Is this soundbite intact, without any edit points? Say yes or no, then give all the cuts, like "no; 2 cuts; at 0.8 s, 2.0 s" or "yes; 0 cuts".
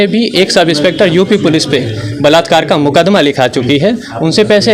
yes; 0 cuts